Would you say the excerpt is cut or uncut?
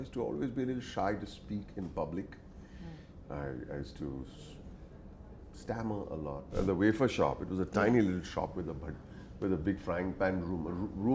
cut